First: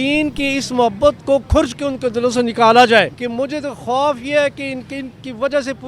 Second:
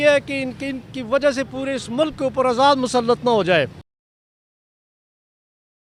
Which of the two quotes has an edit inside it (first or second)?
first